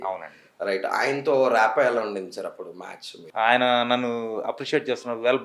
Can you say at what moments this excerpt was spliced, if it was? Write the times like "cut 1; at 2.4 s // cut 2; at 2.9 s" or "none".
cut 1; at 3.2 s